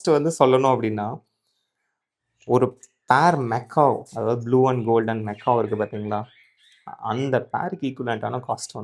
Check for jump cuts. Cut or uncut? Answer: uncut